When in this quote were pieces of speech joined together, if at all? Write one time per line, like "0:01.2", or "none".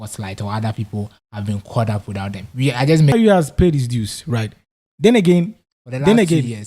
0:03.1